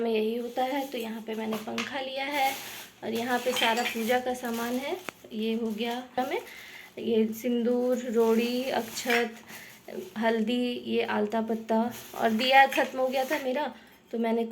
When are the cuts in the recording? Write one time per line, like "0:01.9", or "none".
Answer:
0:06.1